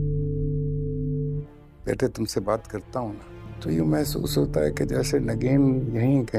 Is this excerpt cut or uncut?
uncut